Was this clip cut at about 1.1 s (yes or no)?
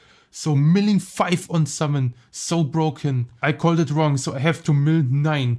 no